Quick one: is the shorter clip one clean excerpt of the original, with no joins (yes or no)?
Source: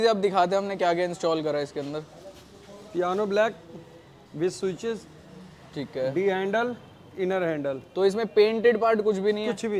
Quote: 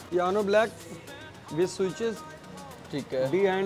yes